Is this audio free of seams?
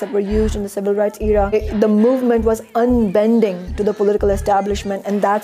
no; 1 cut; at 1.5 s

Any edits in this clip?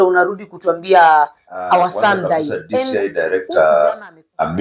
yes; 1 cut; at 2.5 s

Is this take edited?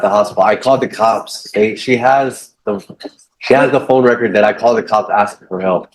no; 0 cuts

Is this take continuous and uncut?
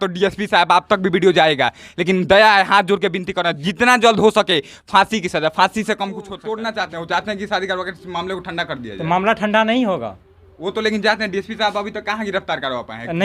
no; 1 cut; at 6.4 s

